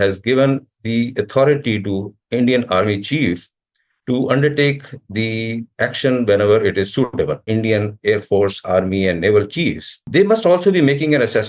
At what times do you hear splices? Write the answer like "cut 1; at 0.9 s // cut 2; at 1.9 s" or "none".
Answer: cut 1; at 7.4 s // cut 2; at 10.0 s